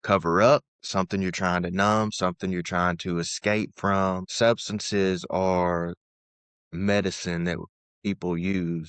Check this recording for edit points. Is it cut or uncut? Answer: cut